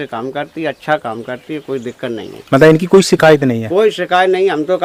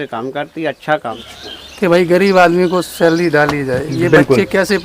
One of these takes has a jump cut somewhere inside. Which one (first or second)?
second